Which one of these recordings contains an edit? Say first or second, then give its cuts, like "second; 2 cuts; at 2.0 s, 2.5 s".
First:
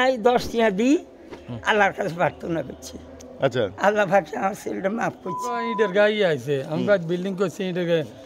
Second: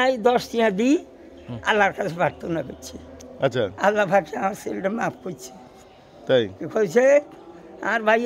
first; 1 cut; at 5.7 s